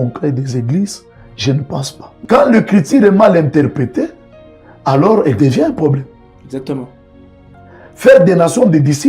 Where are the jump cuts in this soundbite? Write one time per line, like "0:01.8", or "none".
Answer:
0:02.0